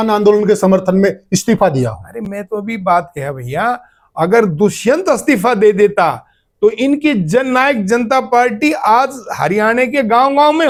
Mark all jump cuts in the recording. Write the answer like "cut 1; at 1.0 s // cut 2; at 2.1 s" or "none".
none